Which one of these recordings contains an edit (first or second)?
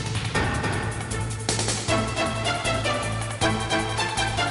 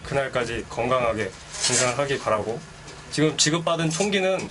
second